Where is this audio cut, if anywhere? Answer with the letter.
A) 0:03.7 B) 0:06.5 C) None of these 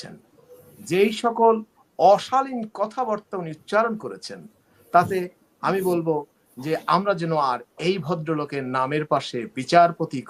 C